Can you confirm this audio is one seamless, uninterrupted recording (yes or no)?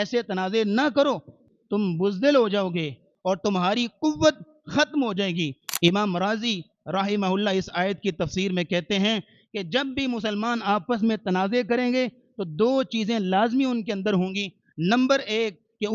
no